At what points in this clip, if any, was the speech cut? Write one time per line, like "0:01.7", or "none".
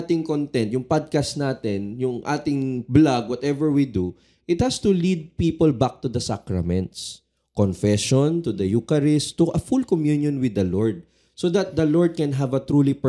none